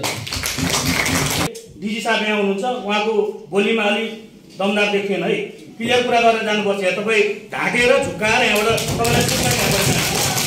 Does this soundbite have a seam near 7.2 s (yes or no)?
no